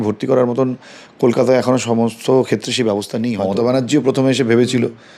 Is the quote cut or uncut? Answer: cut